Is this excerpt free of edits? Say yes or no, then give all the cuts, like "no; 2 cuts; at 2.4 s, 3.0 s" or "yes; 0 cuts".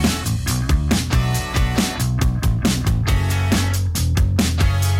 no; 1 cut; at 2.2 s